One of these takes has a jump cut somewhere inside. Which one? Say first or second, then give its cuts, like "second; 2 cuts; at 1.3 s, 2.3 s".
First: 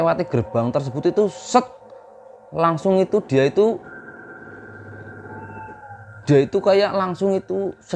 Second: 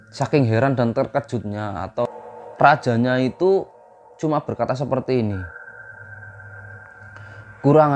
second; 1 cut; at 2.1 s